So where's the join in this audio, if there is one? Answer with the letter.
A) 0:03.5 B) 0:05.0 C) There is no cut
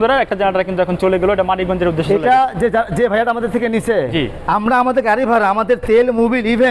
C